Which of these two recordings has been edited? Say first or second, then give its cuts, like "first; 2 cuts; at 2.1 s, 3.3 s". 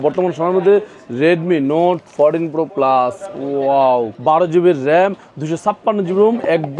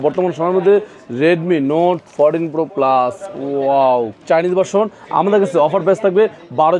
first; 1 cut; at 4.1 s